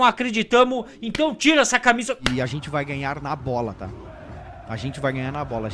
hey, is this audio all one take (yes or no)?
no